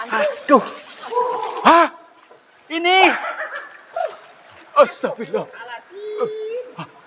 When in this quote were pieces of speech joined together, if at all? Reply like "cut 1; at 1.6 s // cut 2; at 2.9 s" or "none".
cut 1; at 0.9 s

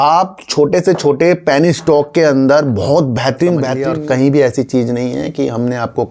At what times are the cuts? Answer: cut 1; at 3.8 s

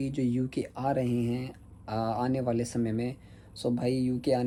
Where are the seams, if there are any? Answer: none

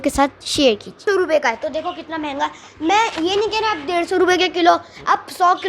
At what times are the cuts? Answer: cut 1; at 1.0 s

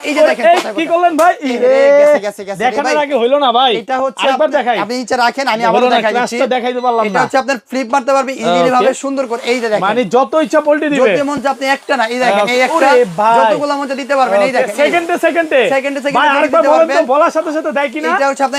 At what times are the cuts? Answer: none

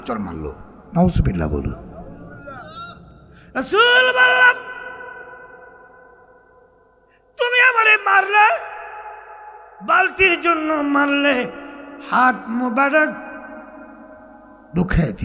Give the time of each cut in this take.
none

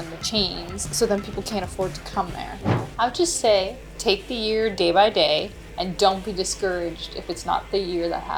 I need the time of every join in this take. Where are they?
cut 1; at 2.7 s // cut 2; at 3.9 s // cut 3; at 5.6 s

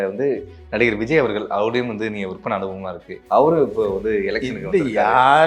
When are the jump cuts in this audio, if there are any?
cut 1; at 3.1 s

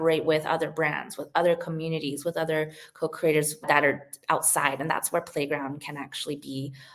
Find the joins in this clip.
none

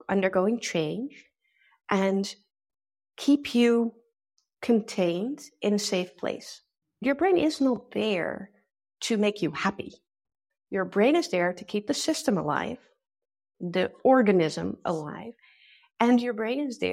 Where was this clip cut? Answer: cut 1; at 7.0 s

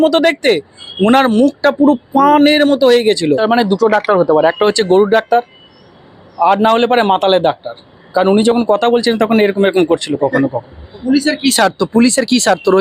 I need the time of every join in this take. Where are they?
cut 1; at 3.4 s // cut 2; at 11.0 s

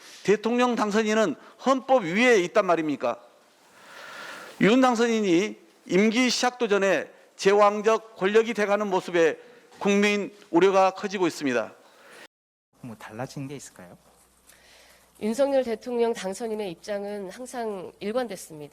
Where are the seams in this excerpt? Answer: cut 1; at 12.3 s

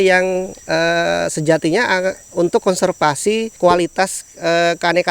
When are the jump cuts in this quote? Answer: cut 1; at 3.5 s

